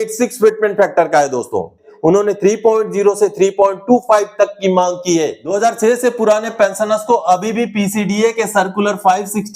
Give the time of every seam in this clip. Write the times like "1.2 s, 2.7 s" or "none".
1.9 s, 5.6 s